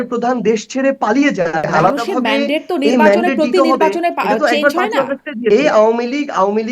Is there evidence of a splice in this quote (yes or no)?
yes